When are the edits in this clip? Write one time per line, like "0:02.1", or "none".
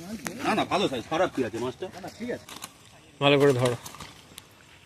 0:02.5